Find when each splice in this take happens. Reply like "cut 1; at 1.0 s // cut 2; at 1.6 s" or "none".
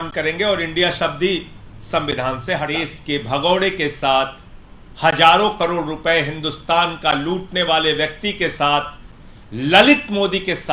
cut 1; at 2.7 s